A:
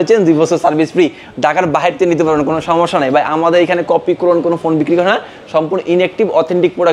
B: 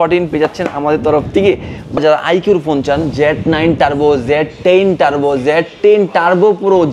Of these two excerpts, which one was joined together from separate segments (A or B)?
B